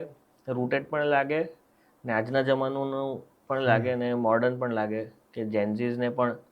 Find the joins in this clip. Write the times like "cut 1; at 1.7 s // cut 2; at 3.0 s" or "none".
none